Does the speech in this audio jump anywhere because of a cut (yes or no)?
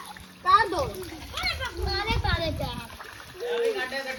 no